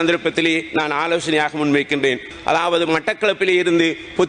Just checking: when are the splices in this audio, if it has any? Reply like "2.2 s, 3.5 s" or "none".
2.3 s

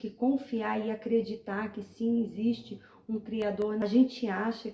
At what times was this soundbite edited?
3.8 s

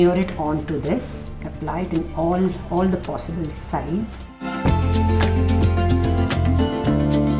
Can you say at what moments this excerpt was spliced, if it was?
none

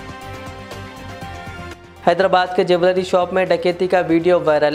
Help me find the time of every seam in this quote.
none

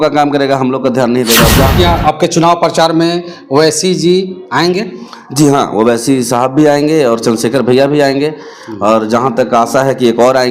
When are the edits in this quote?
1.7 s

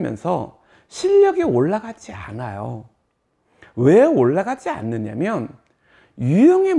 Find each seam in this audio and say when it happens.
none

